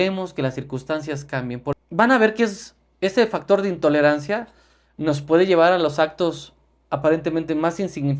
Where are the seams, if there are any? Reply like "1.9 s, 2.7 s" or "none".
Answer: 1.7 s